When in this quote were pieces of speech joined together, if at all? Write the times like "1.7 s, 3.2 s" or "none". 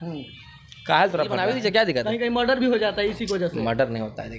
1.5 s